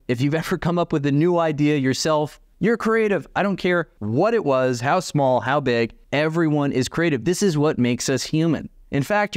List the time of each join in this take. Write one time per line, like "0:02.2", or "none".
0:02.4
0:04.0
0:06.0